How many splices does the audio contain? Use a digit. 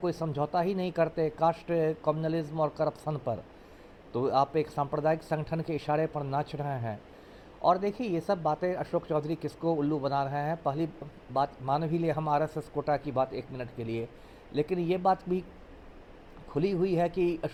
0